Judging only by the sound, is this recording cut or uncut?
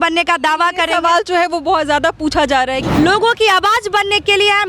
cut